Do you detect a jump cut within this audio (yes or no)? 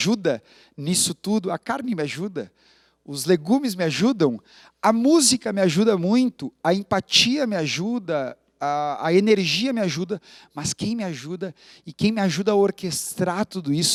no